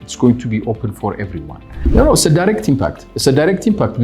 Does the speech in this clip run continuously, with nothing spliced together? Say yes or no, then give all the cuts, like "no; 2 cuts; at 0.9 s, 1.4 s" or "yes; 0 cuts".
no; 1 cut; at 1.9 s